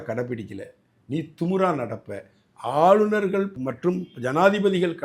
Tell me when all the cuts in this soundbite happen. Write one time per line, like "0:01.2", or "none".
0:03.6